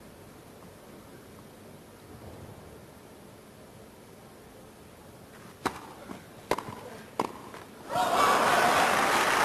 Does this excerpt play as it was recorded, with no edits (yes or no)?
yes